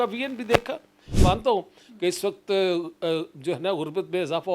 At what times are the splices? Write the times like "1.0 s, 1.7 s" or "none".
1.0 s